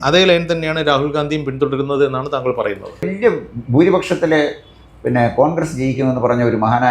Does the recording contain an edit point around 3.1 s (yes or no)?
yes